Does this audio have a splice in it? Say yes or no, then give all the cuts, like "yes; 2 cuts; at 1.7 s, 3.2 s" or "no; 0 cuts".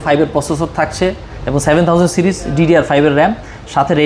no; 0 cuts